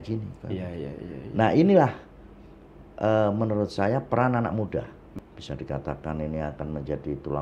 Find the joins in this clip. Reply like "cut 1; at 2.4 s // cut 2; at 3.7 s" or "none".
cut 1; at 5.0 s